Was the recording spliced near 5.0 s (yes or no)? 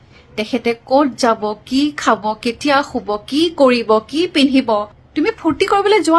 yes